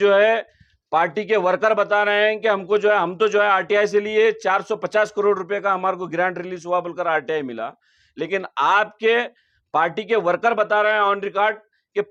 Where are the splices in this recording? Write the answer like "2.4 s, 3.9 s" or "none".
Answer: none